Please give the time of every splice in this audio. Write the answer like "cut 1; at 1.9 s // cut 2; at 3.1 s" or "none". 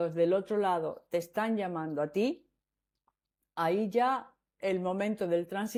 none